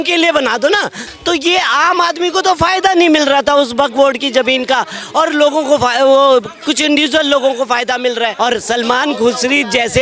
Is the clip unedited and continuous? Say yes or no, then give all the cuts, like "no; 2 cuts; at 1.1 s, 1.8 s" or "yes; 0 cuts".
no; 2 cuts; at 1.0 s, 8.3 s